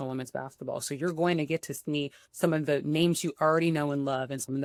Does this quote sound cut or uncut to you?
uncut